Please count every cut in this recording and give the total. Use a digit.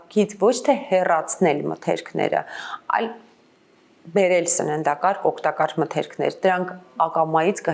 0